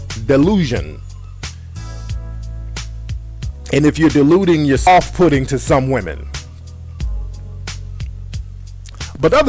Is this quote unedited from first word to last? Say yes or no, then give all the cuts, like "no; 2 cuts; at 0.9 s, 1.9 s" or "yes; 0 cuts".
yes; 0 cuts